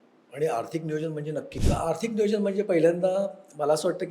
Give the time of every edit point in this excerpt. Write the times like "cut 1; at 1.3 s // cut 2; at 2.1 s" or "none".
cut 1; at 1.5 s